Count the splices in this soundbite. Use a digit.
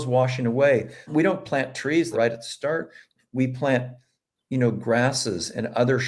2